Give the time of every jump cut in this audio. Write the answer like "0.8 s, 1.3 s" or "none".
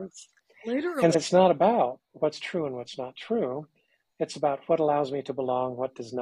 1.1 s